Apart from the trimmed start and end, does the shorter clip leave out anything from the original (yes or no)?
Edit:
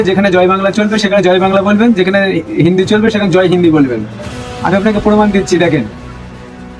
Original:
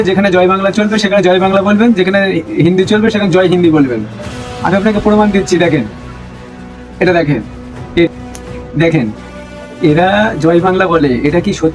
no